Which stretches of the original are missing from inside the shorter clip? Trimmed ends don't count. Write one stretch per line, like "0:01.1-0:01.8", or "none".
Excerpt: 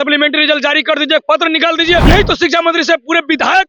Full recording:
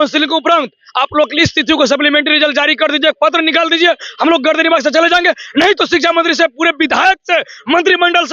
0:04.0-0:05.5